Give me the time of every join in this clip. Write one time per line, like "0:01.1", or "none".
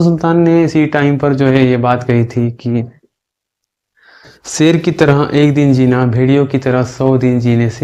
none